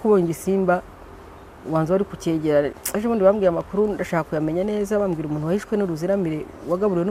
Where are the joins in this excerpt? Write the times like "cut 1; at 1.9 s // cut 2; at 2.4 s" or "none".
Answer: none